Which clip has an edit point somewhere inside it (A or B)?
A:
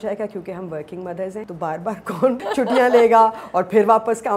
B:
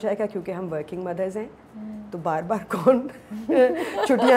A